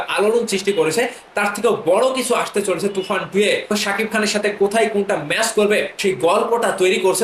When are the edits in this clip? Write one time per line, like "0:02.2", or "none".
0:03.7
0:05.9